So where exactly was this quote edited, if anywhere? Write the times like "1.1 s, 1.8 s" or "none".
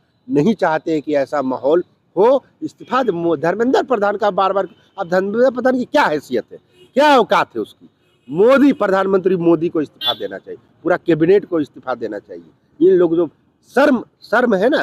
none